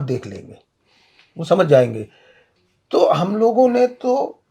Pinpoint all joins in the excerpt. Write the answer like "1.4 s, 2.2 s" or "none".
none